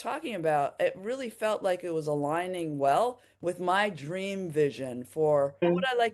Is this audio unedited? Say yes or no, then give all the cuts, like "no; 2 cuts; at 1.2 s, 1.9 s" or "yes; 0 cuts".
yes; 0 cuts